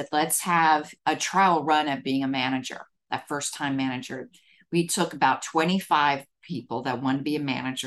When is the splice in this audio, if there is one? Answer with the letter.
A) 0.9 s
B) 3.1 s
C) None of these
A